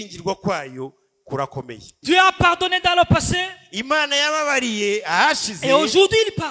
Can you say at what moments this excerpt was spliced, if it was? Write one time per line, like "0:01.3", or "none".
0:01.9